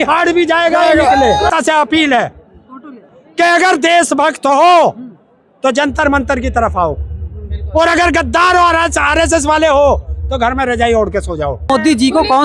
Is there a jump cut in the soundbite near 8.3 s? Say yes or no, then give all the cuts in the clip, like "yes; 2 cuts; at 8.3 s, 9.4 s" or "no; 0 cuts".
no; 2 cuts; at 1.5 s, 11.7 s